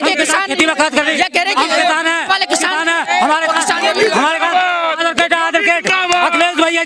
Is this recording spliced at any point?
no; 0 cuts

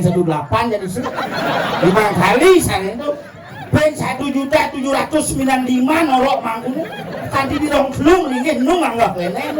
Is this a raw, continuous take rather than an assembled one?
yes; 0 cuts

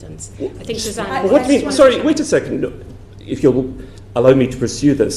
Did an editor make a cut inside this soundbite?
no; 0 cuts

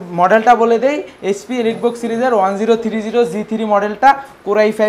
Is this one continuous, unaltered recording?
yes; 0 cuts

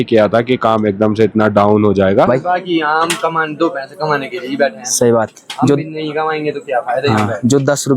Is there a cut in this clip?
yes; 1 cut; at 2.3 s

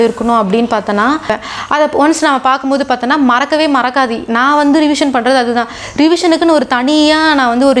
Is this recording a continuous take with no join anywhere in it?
no; 1 cut; at 1.4 s

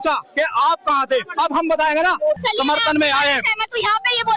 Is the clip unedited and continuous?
no; 1 cut; at 2.4 s

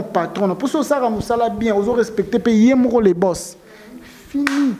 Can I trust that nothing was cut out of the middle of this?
yes; 0 cuts

